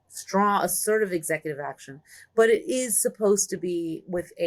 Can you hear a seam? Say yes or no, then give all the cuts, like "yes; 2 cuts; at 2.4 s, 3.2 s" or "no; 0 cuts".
no; 0 cuts